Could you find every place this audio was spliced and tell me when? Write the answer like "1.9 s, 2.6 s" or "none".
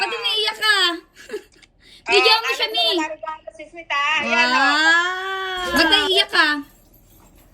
5.7 s